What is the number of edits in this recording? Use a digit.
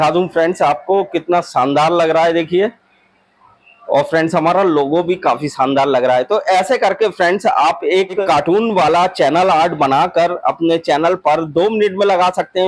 1